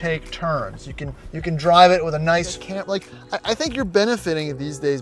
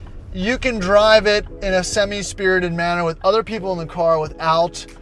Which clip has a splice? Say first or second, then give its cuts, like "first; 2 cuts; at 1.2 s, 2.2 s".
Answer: first; 1 cut; at 2.5 s